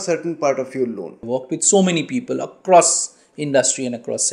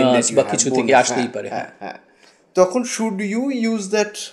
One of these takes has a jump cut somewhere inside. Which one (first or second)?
first